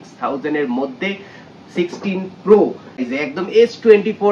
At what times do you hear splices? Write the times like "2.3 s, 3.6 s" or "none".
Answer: 3.0 s